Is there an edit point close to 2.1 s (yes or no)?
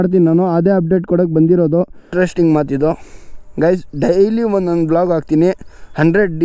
yes